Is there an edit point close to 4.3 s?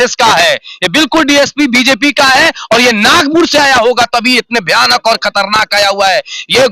no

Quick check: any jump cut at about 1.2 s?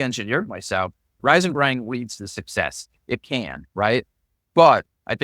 yes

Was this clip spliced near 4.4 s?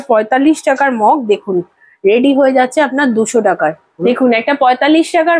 yes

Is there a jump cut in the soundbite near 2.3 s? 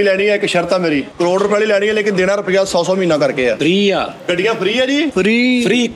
no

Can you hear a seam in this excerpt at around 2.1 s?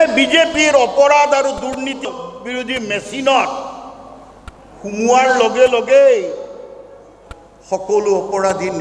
yes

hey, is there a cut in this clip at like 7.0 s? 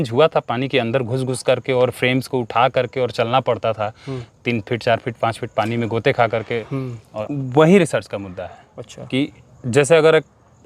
yes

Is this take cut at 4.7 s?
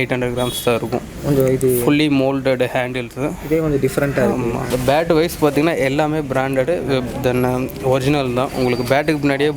yes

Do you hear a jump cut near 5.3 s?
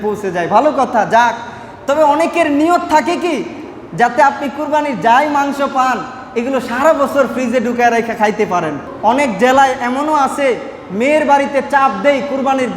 no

